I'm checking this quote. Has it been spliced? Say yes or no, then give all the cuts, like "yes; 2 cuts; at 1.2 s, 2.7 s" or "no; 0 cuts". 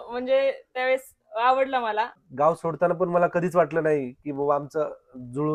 yes; 1 cut; at 2.2 s